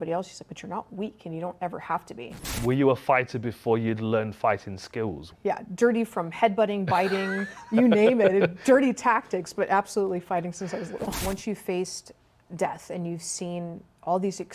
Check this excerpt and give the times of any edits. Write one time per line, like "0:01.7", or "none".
0:02.5
0:05.3
0:11.2